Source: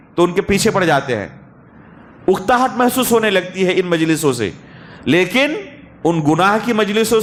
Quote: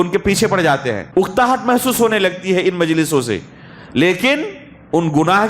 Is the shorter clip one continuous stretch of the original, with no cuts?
no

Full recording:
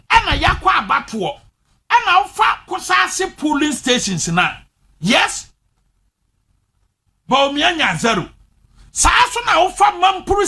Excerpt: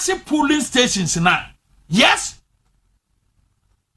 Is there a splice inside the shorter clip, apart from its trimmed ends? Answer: no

